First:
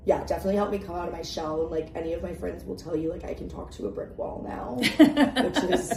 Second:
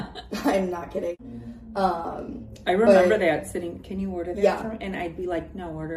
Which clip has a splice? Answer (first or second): second